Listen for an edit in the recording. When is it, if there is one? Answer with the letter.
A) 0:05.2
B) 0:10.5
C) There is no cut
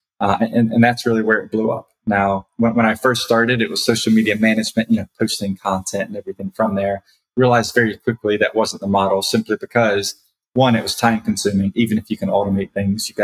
C